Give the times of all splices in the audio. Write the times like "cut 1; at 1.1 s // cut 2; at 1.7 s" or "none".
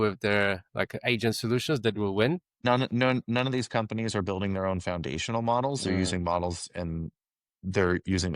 cut 1; at 2.6 s

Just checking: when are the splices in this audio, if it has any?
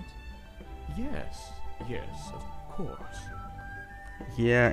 cut 1; at 1.9 s

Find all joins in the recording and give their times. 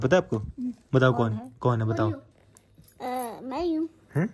cut 1; at 2.2 s

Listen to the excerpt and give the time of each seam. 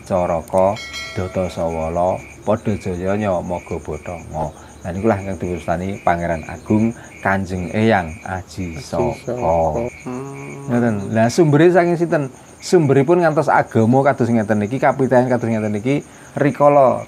cut 1; at 9.9 s

